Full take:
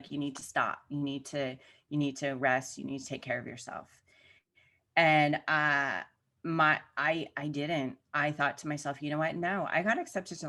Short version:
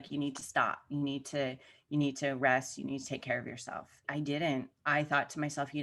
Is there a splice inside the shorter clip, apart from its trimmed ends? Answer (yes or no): yes